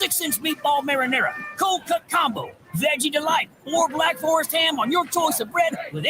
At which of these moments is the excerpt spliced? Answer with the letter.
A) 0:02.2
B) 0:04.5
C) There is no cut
A